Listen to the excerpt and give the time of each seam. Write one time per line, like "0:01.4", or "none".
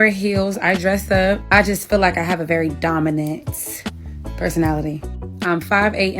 0:05.0